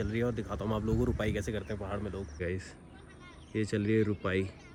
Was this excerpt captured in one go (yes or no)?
yes